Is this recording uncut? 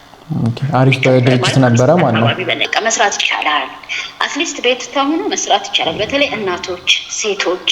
no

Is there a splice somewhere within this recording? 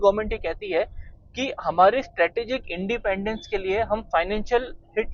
no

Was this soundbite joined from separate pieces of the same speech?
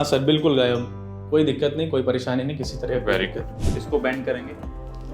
yes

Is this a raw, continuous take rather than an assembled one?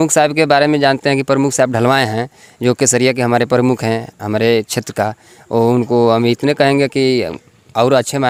yes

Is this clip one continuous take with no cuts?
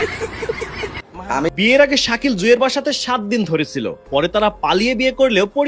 no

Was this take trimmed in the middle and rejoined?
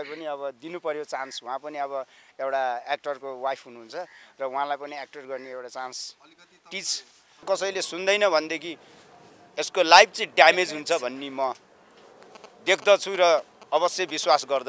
yes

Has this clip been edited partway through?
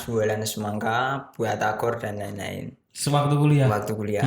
no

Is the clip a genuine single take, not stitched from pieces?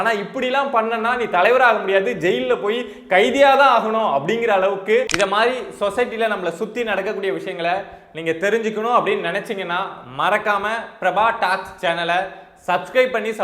no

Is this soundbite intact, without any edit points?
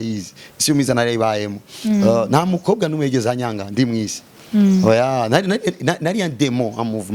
yes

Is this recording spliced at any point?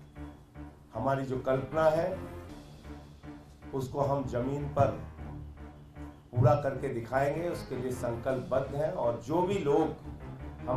yes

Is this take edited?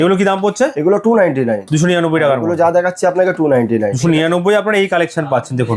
no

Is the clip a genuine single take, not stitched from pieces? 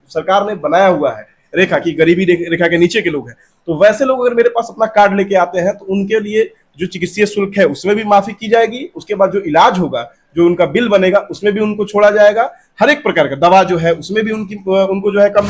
yes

